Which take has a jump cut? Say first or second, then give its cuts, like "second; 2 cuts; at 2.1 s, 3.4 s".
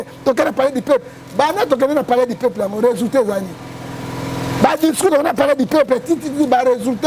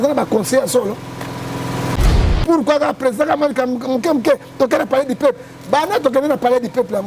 second; 1 cut; at 2.1 s